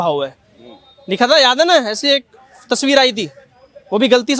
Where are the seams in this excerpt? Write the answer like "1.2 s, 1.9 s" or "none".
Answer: none